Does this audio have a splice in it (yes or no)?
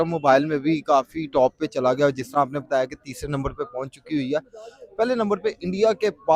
no